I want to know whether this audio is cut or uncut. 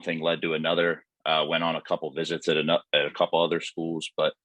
uncut